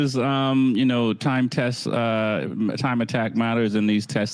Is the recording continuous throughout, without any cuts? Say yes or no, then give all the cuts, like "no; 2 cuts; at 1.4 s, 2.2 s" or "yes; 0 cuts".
yes; 0 cuts